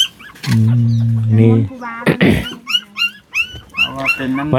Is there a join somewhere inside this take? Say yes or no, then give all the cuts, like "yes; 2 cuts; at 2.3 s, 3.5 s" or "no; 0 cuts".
no; 0 cuts